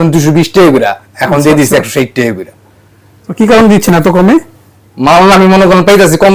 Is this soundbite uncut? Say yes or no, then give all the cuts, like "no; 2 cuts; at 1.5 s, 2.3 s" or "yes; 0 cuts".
yes; 0 cuts